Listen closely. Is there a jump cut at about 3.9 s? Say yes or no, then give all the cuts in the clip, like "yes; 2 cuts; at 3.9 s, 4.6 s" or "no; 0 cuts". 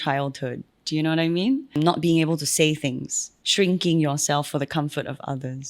no; 1 cut; at 1.7 s